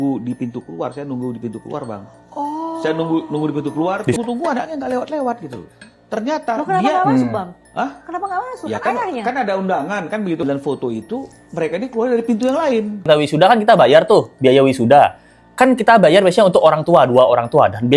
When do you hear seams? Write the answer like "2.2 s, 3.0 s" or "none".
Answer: 4.2 s, 10.4 s, 13.0 s

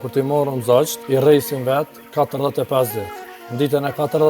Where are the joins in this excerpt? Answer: 1.0 s

